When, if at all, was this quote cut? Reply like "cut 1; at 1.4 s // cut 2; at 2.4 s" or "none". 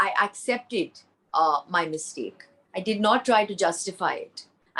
none

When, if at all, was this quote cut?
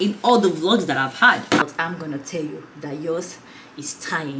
cut 1; at 1.6 s

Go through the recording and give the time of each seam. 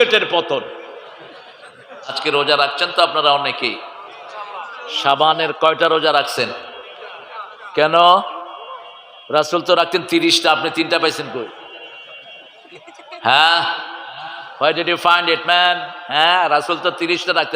cut 1; at 2.2 s

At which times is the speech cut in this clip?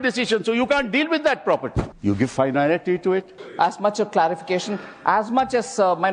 cut 1; at 1.9 s // cut 2; at 3.4 s

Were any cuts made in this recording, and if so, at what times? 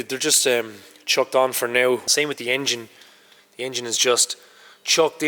cut 1; at 2.0 s

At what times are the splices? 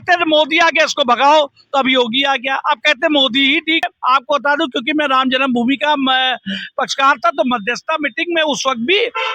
cut 1; at 3.9 s

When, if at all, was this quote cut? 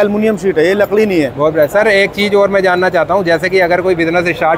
none

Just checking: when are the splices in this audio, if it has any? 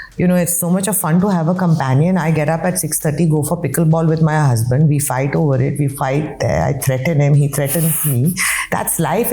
none

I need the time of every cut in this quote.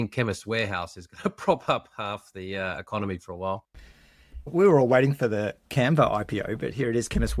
cut 1; at 4.5 s

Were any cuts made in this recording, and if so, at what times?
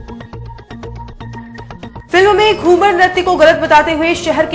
cut 1; at 2.0 s

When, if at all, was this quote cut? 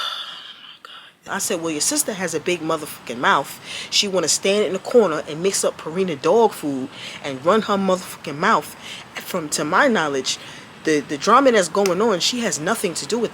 cut 1; at 1.2 s

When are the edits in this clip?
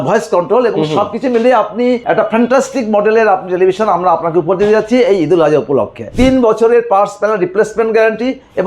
cut 1; at 2.0 s // cut 2; at 6.1 s

